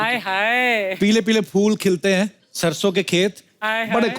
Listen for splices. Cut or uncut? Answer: cut